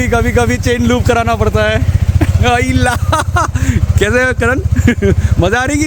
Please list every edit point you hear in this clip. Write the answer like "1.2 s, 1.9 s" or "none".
none